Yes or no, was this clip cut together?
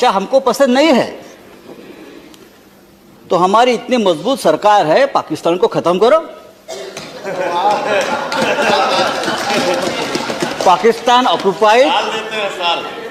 no